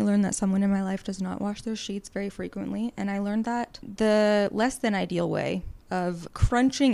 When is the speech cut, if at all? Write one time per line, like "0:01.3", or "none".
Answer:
0:03.8
0:06.0